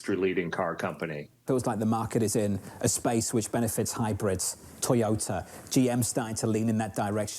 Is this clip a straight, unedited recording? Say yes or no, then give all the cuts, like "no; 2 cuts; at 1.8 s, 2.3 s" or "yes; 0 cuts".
no; 1 cut; at 1.4 s